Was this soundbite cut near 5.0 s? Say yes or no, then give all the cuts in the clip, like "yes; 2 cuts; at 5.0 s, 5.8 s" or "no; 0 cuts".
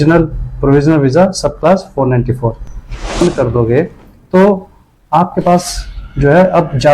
no; 1 cut; at 3.2 s